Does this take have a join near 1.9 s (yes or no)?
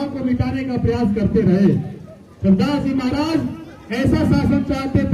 no